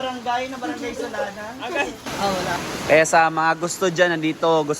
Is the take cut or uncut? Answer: cut